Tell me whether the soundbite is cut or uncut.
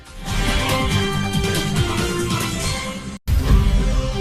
uncut